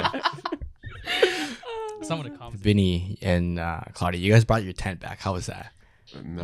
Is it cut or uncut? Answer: cut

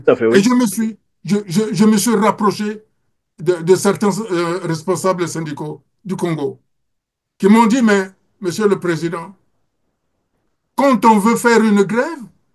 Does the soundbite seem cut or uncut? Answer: uncut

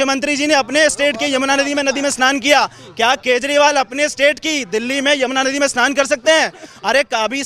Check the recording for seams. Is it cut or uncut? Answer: uncut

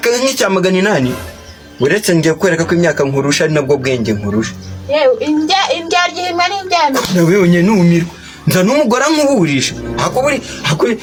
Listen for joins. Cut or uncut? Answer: uncut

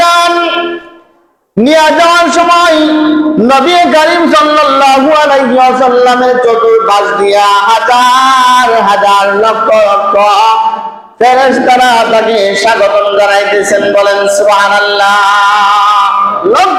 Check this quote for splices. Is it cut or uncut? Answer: uncut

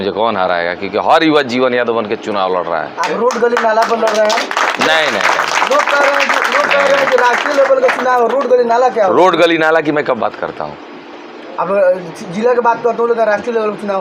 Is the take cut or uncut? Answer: uncut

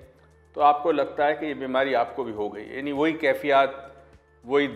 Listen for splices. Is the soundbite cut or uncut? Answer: uncut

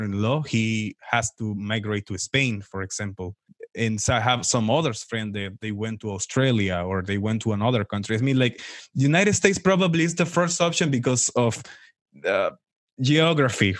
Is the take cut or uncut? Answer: cut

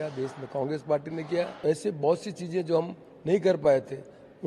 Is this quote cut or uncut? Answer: cut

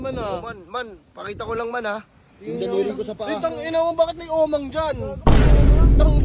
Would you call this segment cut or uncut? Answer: uncut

